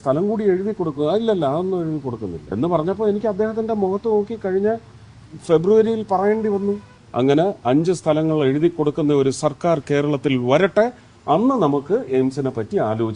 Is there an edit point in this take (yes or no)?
yes